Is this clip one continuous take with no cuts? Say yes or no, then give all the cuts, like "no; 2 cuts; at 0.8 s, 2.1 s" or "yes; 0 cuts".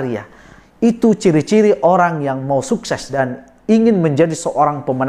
no; 1 cut; at 3.2 s